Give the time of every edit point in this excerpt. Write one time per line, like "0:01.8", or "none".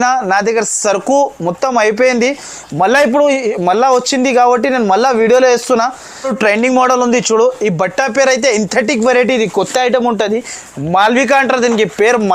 0:06.3